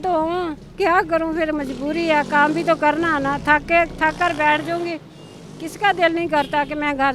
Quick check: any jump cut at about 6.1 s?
no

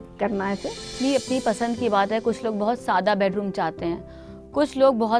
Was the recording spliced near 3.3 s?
no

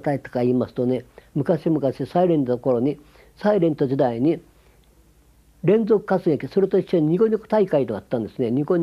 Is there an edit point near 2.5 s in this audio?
yes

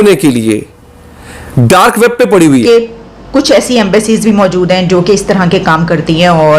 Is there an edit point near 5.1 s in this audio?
no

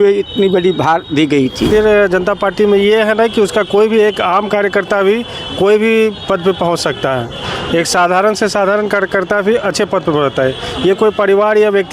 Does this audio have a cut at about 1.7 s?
yes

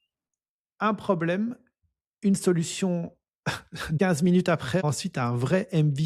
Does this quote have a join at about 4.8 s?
yes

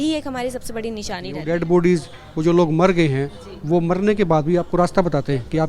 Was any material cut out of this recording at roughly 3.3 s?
no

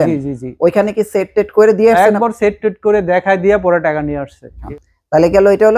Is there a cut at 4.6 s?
yes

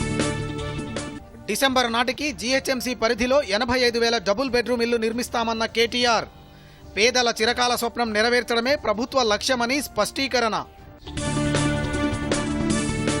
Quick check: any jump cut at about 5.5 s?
no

